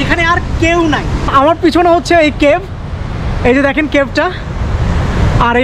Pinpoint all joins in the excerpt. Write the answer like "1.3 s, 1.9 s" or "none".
1.2 s